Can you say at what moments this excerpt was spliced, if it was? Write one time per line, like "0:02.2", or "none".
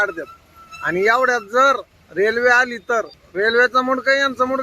0:02.0
0:03.2